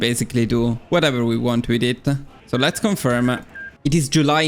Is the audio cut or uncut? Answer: cut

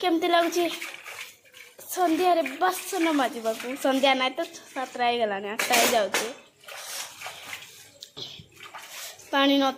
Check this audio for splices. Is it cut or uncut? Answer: uncut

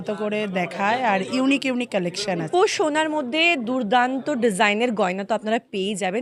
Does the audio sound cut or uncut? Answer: cut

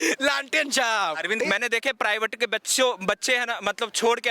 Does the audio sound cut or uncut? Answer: cut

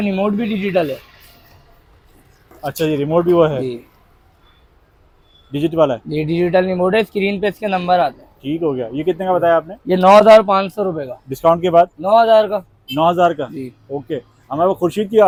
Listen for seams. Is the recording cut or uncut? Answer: uncut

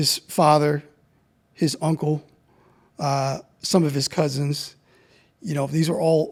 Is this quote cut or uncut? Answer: uncut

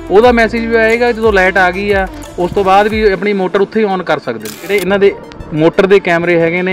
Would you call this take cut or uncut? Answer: cut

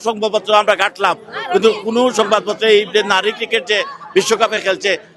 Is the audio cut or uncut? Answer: uncut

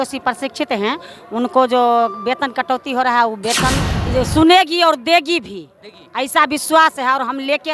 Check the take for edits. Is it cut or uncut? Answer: cut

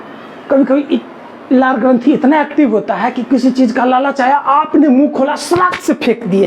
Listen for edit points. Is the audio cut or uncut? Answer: uncut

